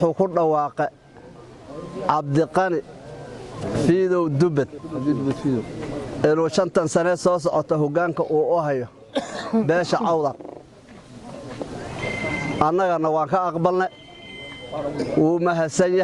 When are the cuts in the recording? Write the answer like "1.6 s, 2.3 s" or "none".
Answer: 11.9 s